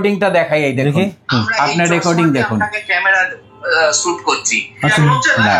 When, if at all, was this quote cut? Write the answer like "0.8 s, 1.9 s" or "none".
none